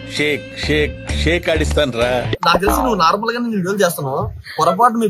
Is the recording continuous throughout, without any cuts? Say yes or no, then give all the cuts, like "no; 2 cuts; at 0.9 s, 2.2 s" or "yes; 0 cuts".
no; 1 cut; at 2.4 s